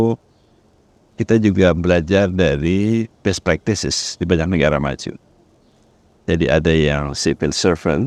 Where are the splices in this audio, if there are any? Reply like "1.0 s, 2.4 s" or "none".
none